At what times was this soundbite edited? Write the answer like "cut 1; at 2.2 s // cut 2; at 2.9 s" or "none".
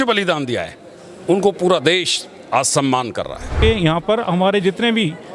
cut 1; at 3.6 s